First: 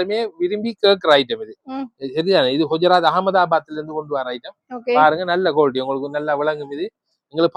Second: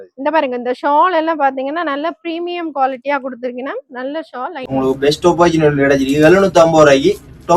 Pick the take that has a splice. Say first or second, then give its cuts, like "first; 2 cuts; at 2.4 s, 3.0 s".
second; 1 cut; at 4.6 s